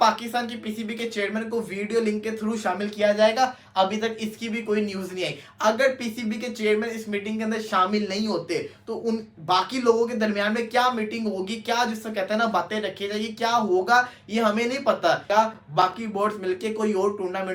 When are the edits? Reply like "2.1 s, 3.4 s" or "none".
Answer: 15.3 s